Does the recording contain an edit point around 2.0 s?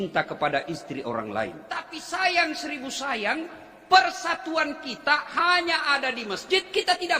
yes; 1 cut; at 2.0 s

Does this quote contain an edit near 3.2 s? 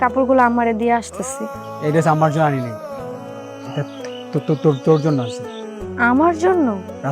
yes; 1 cut; at 3.2 s

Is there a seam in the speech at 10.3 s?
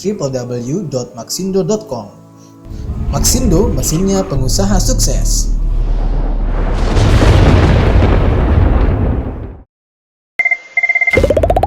yes; 1 cut; at 10.3 s

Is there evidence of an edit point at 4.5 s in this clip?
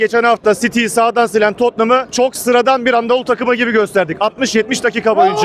no; 0 cuts

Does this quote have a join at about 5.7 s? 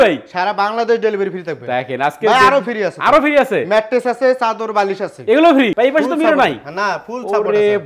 yes; 1 cut; at 5.7 s

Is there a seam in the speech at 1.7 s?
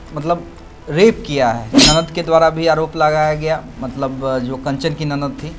yes; 1 cut; at 1.7 s

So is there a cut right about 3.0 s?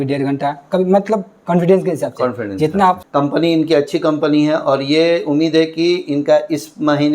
yes; 1 cut; at 3.0 s

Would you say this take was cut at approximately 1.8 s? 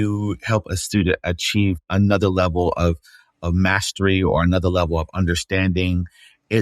yes; 1 cut; at 1.8 s

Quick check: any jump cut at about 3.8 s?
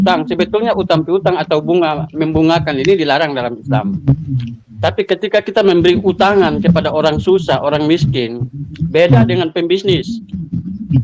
no; 0 cuts

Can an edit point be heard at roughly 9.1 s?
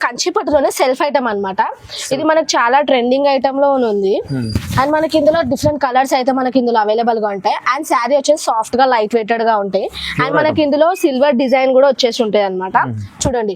no; 0 cuts

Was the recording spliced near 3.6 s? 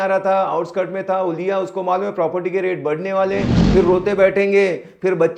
yes; 1 cut; at 3.6 s

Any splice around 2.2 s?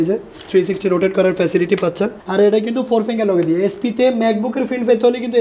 yes; 1 cut; at 2.2 s

